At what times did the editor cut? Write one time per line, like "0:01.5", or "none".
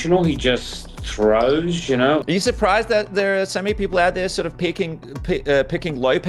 0:02.2